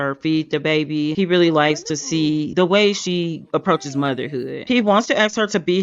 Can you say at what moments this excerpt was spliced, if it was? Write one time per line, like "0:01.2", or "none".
0:01.1
0:04.6